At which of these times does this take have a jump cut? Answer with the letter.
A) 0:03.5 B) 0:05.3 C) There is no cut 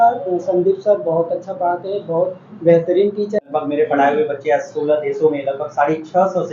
A